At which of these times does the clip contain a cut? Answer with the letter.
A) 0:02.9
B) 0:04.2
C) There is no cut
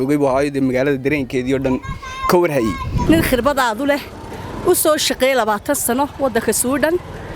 A